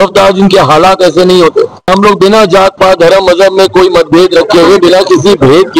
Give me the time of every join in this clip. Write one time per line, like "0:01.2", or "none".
0:01.9